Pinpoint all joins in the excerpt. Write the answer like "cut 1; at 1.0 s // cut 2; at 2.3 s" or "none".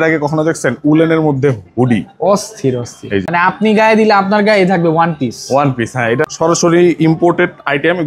cut 1; at 3.2 s // cut 2; at 6.3 s